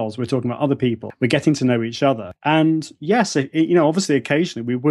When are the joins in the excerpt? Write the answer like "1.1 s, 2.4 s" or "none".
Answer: 1.1 s, 2.3 s